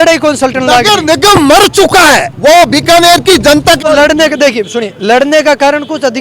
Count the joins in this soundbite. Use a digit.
1